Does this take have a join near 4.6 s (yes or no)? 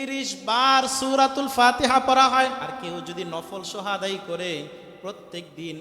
no